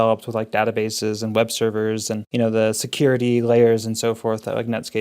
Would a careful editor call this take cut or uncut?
cut